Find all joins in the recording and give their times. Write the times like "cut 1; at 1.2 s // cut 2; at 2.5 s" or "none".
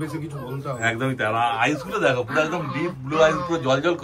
none